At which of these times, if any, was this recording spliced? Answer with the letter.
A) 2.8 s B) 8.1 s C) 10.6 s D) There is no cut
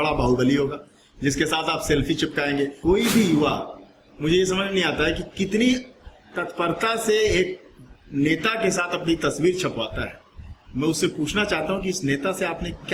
A